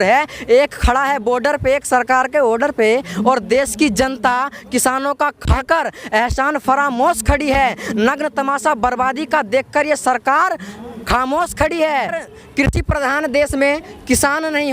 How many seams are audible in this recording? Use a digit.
1